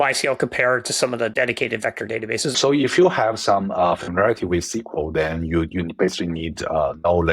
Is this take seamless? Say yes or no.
no